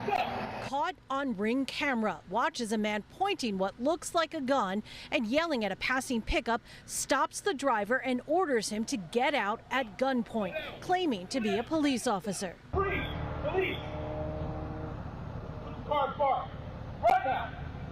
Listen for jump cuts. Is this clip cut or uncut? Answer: cut